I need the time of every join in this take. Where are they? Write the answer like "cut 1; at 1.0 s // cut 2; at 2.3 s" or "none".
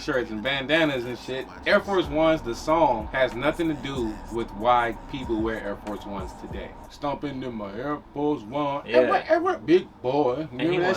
cut 1; at 1.5 s // cut 2; at 3.1 s // cut 3; at 6.8 s